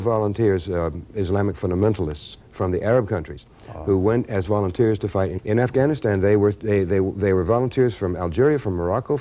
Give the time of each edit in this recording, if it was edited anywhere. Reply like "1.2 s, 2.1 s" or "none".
5.3 s